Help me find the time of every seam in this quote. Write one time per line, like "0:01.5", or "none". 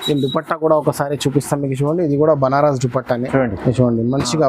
0:03.2